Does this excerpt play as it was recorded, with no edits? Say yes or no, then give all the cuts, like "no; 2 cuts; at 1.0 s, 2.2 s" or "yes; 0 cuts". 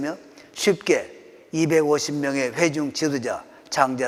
yes; 0 cuts